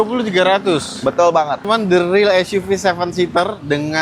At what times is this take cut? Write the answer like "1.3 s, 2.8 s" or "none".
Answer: 1.6 s